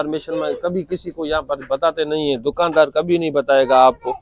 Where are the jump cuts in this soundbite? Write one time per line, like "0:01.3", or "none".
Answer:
none